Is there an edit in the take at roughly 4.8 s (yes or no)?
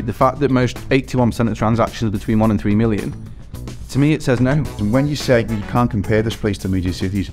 yes